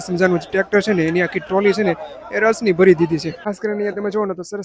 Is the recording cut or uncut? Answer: cut